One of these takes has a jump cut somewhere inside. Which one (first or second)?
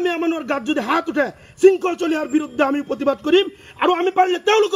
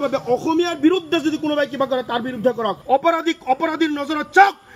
second